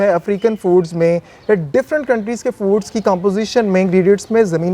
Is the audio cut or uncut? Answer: uncut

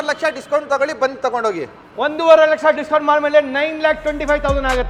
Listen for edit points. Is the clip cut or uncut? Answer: uncut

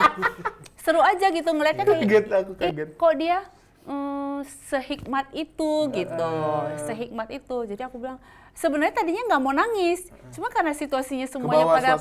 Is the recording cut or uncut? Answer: uncut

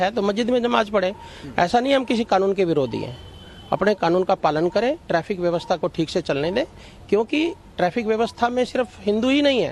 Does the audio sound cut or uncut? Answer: uncut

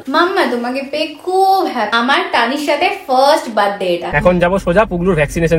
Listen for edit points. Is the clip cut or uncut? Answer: cut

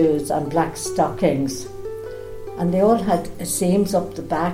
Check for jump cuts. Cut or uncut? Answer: uncut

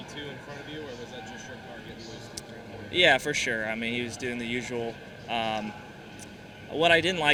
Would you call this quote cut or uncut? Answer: uncut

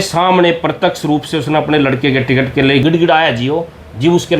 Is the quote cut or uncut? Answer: cut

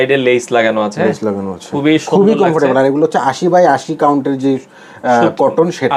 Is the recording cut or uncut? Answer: uncut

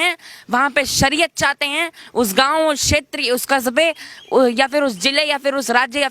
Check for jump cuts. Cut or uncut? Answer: uncut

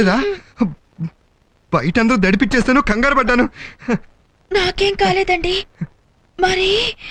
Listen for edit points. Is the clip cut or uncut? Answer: uncut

